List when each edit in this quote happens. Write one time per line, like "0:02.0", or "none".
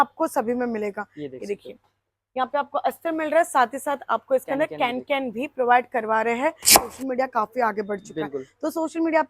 0:06.8